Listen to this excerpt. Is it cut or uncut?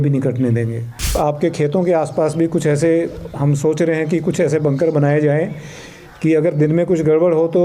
cut